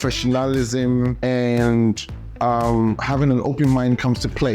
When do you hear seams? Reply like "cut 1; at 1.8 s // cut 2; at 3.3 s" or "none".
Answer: cut 1; at 1.2 s // cut 2; at 3.0 s